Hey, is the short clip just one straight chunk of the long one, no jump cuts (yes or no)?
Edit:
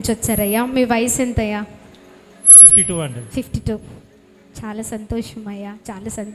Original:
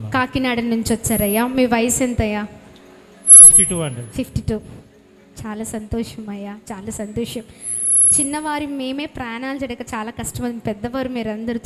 yes